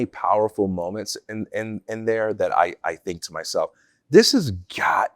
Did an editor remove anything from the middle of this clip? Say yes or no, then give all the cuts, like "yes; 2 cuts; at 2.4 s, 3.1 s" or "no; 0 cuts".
no; 0 cuts